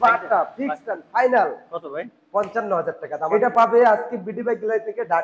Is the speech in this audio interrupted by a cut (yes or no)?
yes